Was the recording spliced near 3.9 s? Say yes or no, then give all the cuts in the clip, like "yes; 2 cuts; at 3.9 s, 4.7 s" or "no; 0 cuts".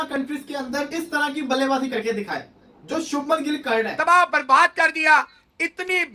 yes; 2 cuts; at 0.9 s, 3.9 s